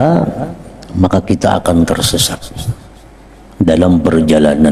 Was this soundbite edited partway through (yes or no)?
no